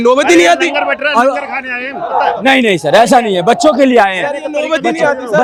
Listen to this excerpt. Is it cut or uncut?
uncut